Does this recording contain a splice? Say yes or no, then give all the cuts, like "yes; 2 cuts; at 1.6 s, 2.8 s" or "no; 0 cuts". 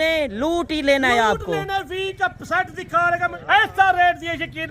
yes; 1 cut; at 3.4 s